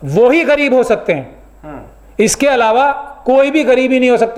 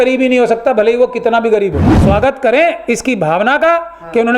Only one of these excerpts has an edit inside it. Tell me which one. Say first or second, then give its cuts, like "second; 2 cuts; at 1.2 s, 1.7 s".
second; 1 cut; at 2.0 s